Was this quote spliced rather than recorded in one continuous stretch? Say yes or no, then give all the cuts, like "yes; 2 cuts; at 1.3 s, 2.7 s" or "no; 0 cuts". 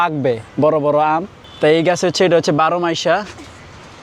yes; 1 cut; at 1.4 s